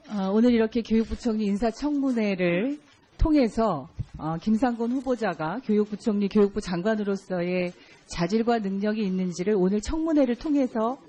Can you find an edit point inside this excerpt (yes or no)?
no